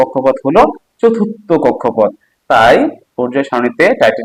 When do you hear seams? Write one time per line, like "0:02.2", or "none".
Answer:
none